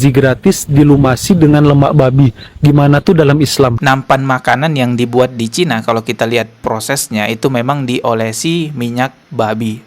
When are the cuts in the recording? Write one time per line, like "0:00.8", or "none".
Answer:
0:03.8